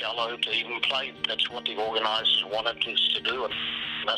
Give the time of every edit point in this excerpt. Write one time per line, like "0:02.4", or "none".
0:01.2